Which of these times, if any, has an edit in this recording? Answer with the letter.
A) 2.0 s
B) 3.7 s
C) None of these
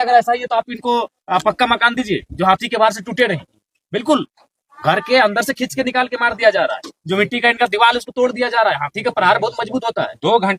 C